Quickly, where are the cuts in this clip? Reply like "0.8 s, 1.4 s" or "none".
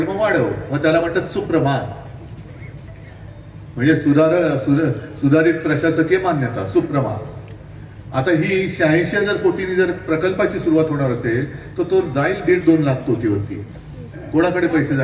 none

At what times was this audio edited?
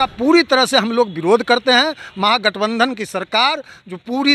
none

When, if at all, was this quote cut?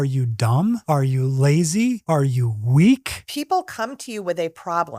0.8 s, 2.0 s, 3.2 s

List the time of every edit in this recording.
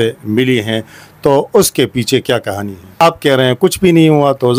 3.0 s

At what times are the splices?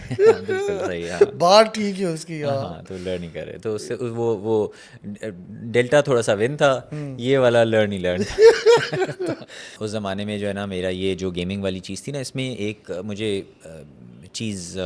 9.7 s

